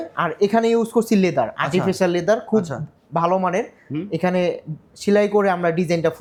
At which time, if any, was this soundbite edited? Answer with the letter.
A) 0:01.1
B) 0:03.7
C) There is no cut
C